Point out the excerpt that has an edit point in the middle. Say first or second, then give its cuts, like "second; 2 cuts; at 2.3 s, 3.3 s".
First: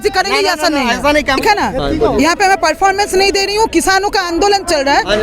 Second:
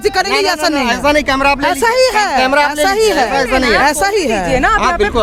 first; 1 cut; at 1.4 s